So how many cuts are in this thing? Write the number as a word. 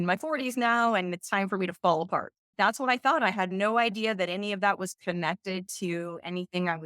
one